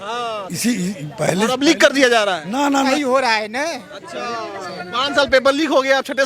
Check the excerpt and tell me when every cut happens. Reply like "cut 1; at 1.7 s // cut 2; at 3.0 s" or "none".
cut 1; at 2.9 s